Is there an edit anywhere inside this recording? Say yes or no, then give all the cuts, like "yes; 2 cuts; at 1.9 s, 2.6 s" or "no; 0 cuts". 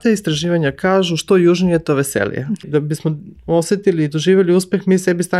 yes; 1 cut; at 2.6 s